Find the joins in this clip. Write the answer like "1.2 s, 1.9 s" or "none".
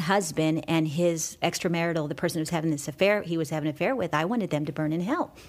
1.4 s